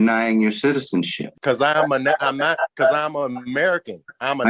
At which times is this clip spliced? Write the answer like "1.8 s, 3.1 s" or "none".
1.4 s

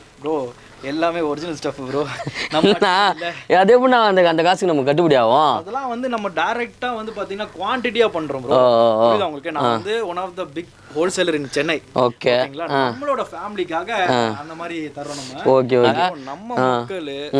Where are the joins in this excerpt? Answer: 15.8 s

